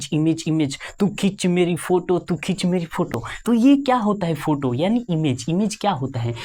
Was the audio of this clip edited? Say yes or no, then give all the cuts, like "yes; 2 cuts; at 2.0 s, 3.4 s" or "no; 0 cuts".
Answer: no; 0 cuts